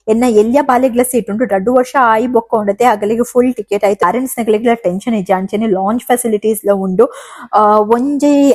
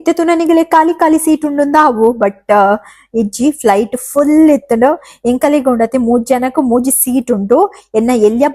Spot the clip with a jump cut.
first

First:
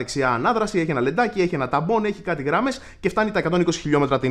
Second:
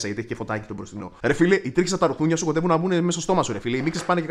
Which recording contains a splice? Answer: second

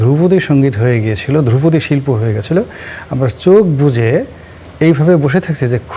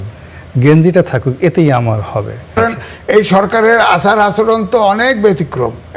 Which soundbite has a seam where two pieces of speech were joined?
second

